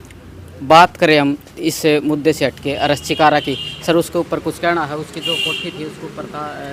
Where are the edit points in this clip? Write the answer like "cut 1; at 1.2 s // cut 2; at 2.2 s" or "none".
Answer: none